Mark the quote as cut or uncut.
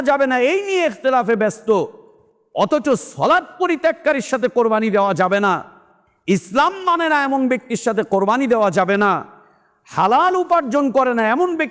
uncut